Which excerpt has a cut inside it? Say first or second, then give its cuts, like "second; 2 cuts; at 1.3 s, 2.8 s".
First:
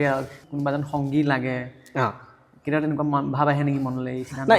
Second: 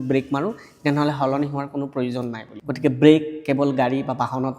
second; 1 cut; at 2.5 s